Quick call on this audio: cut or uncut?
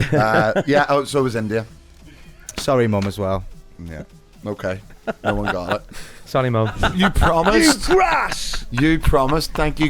cut